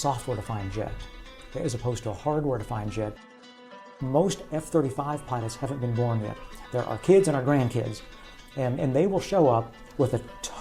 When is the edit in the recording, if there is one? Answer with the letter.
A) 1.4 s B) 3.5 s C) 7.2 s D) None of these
B